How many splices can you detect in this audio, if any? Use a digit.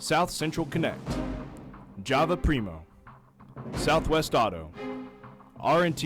2